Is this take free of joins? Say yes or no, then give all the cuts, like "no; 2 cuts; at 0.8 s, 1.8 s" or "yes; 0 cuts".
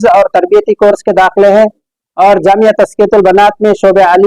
yes; 0 cuts